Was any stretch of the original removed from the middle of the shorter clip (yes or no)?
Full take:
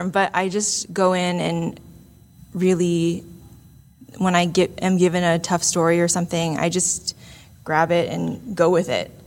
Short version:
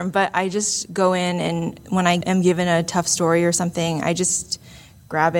yes